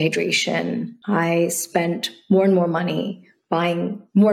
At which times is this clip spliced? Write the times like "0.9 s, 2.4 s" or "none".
0.9 s